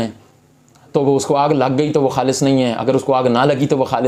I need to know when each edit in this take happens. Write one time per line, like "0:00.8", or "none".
none